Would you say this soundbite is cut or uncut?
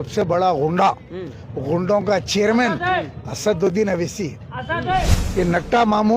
cut